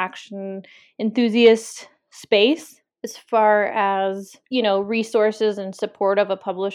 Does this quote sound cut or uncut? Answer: cut